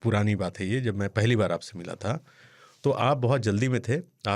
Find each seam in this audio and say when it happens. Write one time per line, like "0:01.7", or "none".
none